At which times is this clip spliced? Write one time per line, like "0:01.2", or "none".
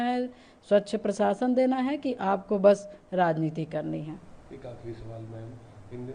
none